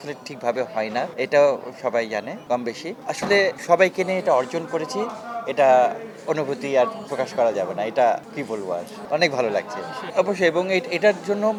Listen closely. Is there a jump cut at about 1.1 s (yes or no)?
no